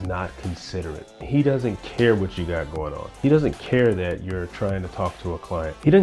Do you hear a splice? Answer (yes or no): yes